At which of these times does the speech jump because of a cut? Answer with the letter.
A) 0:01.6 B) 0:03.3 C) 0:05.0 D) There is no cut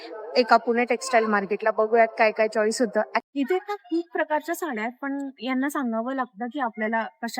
B